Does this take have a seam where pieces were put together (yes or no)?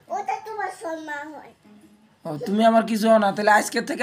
no